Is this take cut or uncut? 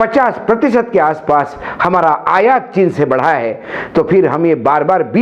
uncut